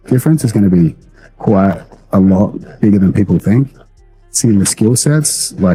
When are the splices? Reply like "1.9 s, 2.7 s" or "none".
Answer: none